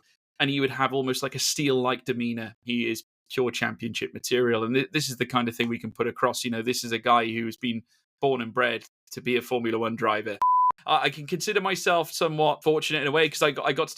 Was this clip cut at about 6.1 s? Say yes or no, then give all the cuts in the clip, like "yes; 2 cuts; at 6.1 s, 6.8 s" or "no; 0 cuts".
no; 3 cuts; at 2.6 s, 10.5 s, 12.6 s